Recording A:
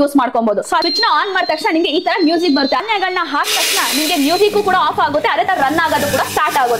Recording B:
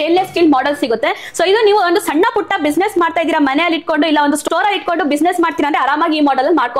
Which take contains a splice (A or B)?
A